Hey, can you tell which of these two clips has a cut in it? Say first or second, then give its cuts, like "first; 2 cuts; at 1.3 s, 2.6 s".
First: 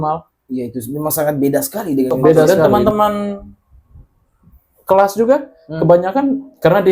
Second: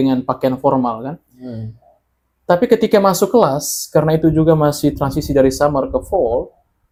first; 1 cut; at 2.5 s